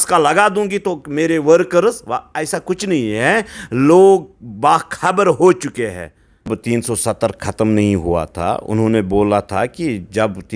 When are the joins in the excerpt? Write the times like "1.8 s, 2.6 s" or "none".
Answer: 6.5 s